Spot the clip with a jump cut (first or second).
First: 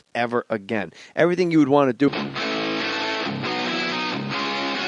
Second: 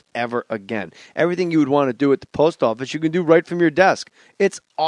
second